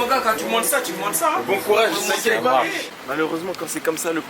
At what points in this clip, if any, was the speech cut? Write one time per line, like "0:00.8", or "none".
0:02.9